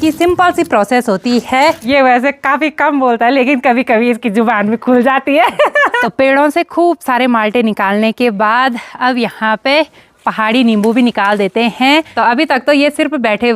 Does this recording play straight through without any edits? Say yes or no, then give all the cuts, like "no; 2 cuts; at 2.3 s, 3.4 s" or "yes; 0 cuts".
no; 3 cuts; at 1.8 s, 6.0 s, 12.1 s